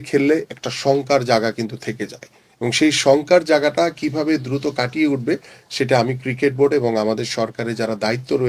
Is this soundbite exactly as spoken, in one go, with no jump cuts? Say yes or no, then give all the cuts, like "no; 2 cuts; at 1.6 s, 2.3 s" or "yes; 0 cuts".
yes; 0 cuts